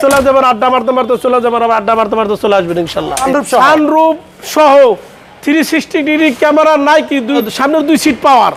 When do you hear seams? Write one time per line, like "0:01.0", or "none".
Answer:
0:03.3
0:07.5